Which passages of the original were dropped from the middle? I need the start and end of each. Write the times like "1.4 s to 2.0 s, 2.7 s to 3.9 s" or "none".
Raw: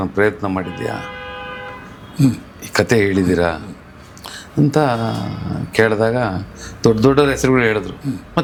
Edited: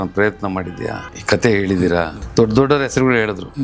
1.1 s to 2.6 s, 3.7 s to 6.7 s